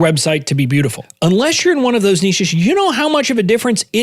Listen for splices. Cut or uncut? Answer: cut